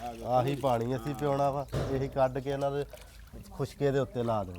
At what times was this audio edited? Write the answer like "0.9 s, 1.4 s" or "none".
none